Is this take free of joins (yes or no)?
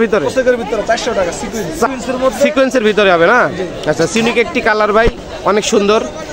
no